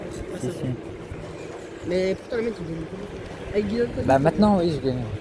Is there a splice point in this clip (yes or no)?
no